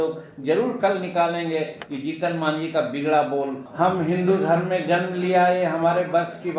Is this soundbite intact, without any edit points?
no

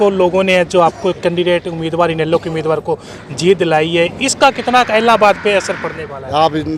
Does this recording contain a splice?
no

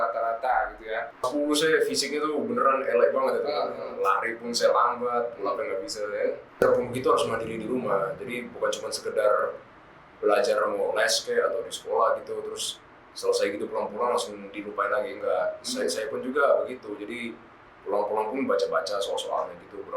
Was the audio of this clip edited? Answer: yes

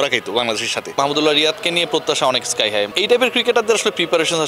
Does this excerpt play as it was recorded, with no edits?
no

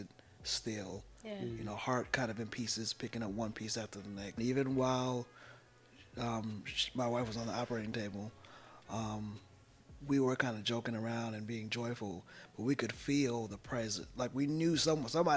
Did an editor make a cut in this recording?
yes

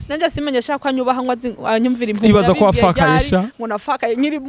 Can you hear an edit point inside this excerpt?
no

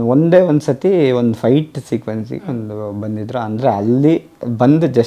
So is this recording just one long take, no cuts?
yes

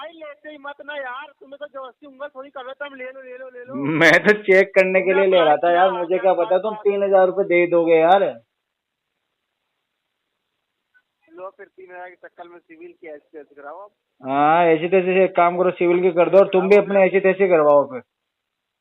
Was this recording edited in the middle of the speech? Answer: no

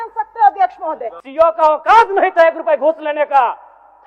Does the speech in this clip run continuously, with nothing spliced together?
no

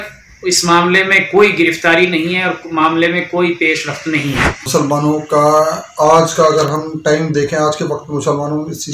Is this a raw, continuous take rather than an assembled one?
no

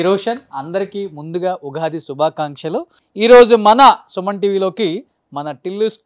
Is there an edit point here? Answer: yes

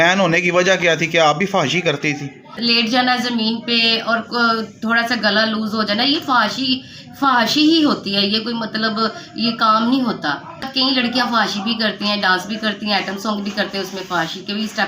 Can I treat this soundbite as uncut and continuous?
no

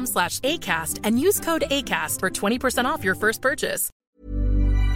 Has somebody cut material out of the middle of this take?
yes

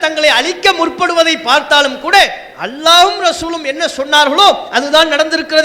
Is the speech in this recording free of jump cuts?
yes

